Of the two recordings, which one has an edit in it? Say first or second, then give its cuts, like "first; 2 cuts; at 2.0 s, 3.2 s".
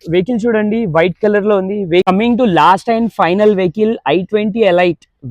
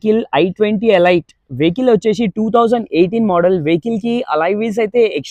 first; 1 cut; at 2.1 s